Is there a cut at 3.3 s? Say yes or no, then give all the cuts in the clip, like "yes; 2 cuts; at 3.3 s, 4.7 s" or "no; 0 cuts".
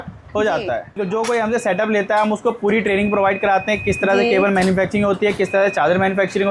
no; 1 cut; at 1.0 s